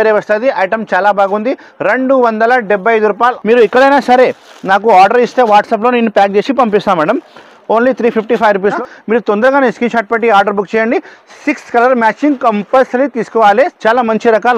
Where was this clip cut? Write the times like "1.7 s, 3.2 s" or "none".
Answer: 3.4 s, 8.8 s, 13.7 s